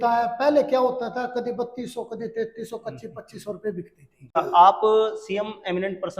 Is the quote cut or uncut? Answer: cut